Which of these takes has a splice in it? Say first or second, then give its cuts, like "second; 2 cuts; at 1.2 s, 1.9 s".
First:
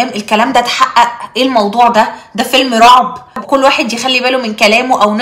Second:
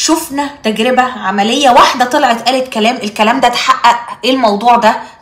first; 1 cut; at 3.4 s